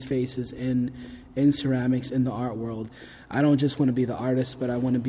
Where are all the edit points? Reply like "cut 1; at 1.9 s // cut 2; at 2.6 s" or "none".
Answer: cut 1; at 2.9 s